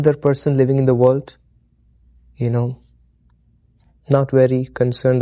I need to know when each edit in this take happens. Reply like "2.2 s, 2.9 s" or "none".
none